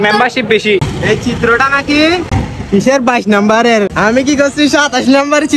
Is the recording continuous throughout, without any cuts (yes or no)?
no